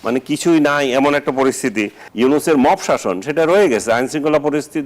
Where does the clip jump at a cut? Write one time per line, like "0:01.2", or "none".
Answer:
0:02.0